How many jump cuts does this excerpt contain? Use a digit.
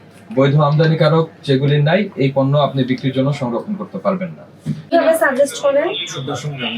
1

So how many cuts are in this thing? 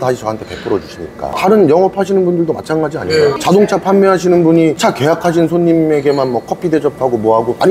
0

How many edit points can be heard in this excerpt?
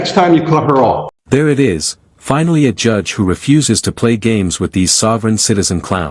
0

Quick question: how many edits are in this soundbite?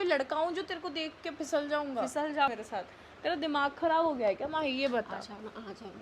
1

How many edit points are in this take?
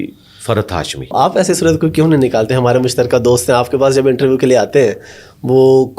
1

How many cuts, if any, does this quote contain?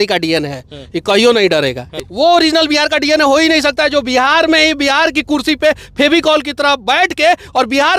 1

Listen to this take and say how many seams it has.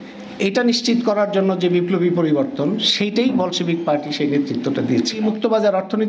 1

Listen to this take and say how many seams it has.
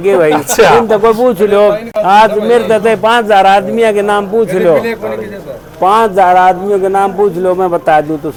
0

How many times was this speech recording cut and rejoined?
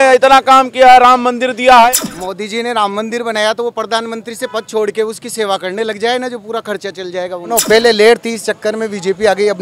2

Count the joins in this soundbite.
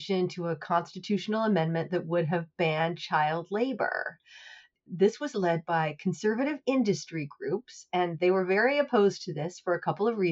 1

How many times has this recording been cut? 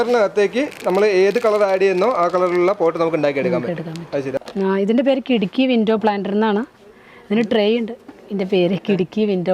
1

